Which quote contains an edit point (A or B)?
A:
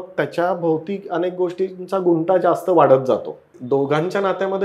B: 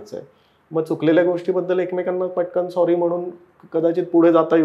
A